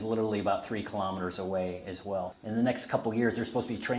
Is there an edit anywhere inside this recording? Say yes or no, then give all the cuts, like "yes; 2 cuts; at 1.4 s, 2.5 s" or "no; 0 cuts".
yes; 1 cut; at 2.4 s